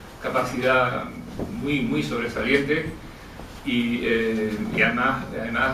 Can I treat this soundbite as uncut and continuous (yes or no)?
no